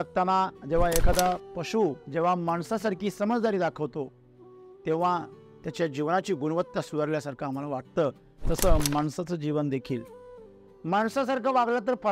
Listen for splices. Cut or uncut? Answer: cut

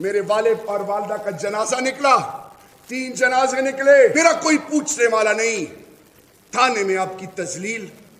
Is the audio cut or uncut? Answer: cut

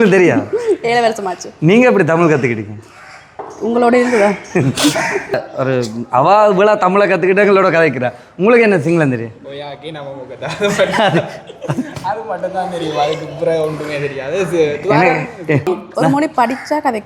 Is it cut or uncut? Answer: cut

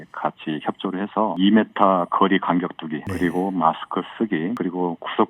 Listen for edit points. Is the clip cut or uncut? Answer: cut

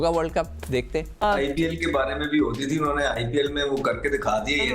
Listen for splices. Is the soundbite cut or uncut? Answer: cut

